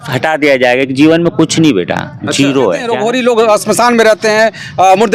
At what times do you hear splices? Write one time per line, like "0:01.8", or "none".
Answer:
0:02.9